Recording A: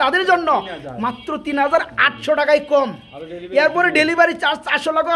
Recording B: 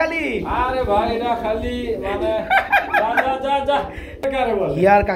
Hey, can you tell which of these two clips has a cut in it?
B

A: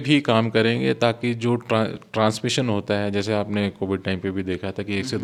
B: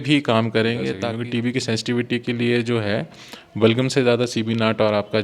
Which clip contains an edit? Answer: B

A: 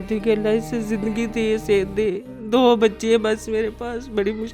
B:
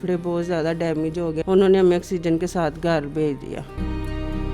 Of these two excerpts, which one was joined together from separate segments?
B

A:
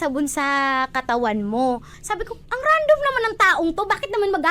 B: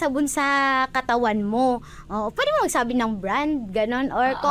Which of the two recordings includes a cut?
A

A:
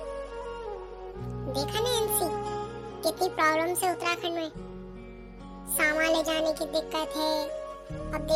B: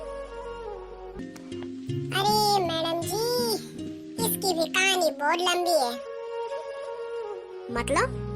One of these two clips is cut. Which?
B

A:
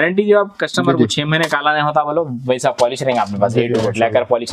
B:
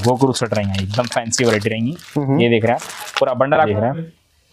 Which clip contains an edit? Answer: B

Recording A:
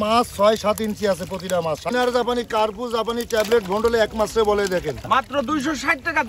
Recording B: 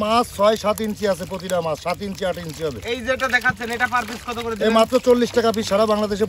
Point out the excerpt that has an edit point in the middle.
A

